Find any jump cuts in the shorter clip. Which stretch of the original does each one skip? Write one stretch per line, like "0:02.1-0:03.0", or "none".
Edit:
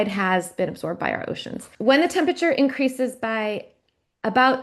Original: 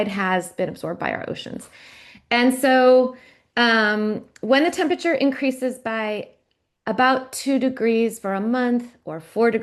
0:01.7-0:04.3